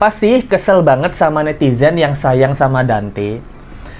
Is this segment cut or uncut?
uncut